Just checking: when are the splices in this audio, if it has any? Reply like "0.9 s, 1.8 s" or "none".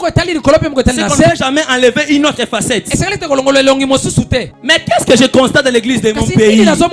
4.6 s